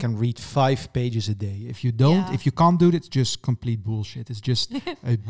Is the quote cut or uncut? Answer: uncut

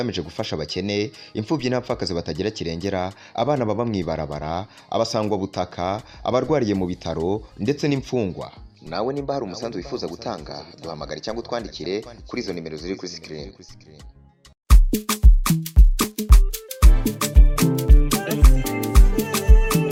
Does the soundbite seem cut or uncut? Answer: uncut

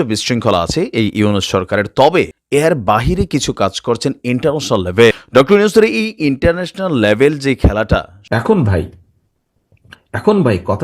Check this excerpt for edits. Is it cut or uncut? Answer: cut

